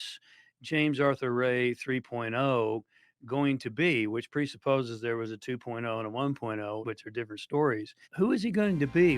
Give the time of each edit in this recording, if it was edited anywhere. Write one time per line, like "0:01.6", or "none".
0:06.8
0:08.0